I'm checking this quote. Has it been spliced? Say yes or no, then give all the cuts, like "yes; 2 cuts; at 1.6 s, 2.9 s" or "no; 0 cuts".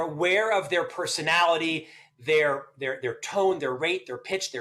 no; 0 cuts